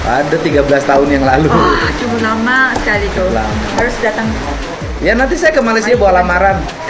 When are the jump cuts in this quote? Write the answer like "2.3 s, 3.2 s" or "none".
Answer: none